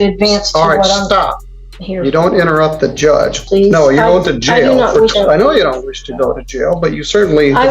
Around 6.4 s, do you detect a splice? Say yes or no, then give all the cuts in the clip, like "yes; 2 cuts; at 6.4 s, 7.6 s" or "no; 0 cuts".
no; 2 cuts; at 3.4 s, 5.1 s